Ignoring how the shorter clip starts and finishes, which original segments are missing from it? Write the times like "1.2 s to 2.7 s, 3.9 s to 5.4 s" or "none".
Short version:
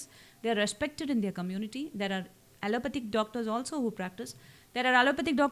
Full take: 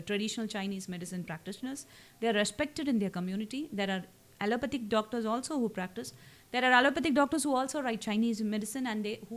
none